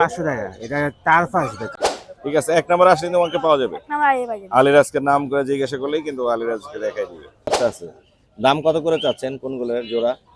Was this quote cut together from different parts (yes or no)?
yes